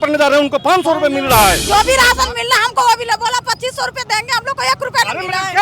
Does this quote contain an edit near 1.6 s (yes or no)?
yes